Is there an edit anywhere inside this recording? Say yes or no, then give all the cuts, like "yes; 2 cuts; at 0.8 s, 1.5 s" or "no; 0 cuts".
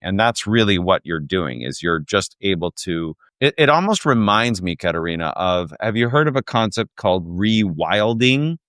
no; 0 cuts